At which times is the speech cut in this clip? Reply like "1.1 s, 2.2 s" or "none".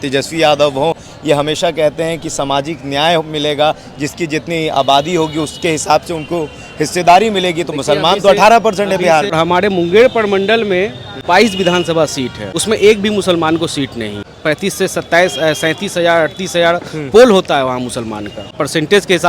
9.3 s, 11.1 s, 12.5 s, 14.3 s, 18.5 s